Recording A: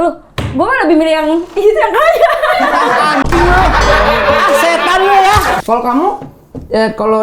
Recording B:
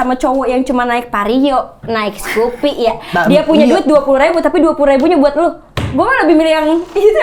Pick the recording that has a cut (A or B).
A